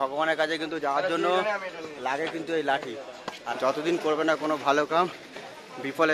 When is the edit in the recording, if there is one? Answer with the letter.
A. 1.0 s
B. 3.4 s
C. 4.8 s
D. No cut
B